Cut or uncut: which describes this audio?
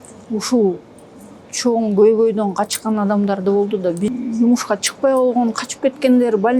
cut